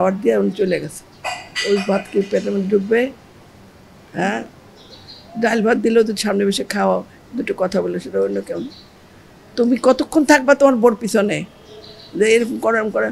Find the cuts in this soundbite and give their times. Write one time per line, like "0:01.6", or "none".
none